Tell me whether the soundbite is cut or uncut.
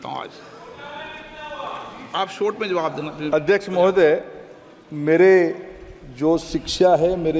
uncut